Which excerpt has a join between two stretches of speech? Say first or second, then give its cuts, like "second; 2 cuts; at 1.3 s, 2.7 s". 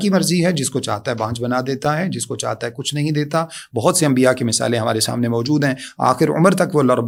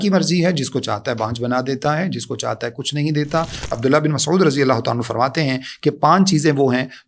second; 1 cut; at 3.7 s